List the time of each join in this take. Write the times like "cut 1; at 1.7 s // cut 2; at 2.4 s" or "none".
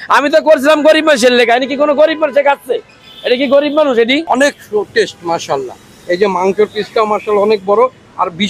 cut 1; at 4.2 s